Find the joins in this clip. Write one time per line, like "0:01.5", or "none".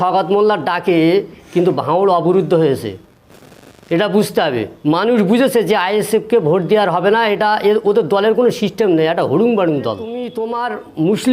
0:10.4